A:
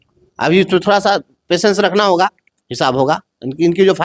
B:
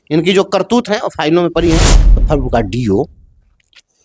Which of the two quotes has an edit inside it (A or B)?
B